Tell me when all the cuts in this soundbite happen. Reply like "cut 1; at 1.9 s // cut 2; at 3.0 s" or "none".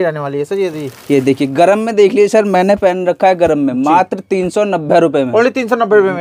none